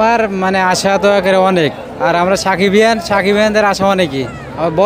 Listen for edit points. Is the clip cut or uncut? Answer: uncut